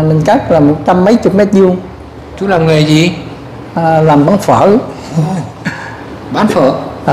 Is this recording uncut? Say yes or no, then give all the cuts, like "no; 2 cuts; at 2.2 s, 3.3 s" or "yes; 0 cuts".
yes; 0 cuts